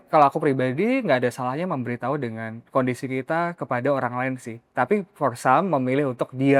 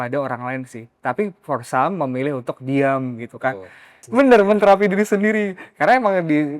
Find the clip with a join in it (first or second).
second